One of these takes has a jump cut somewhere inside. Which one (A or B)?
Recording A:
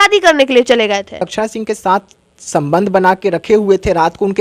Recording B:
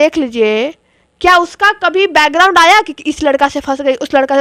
A